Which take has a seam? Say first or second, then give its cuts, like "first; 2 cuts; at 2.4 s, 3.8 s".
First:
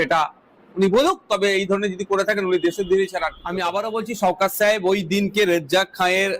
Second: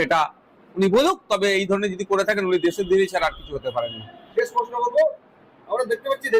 first; 1 cut; at 3.4 s